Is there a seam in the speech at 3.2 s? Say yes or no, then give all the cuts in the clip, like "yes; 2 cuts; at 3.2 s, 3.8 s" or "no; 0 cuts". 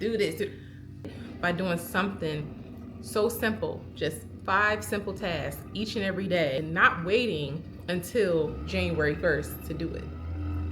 no; 2 cuts; at 1.1 s, 6.6 s